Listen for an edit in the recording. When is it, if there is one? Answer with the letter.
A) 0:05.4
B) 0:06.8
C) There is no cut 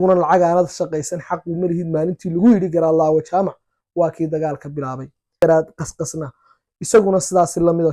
A